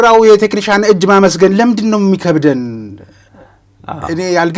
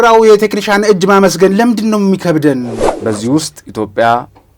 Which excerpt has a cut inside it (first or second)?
second